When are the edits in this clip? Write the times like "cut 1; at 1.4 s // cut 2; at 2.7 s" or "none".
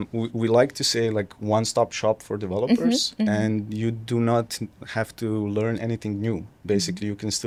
none